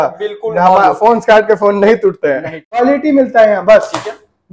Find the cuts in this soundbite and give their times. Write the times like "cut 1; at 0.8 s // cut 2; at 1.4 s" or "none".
cut 1; at 2.8 s